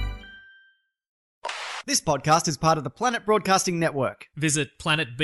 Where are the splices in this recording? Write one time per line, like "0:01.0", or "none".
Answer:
0:01.2